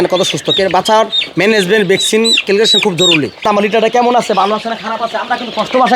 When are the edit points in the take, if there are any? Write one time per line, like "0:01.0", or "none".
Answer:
0:03.4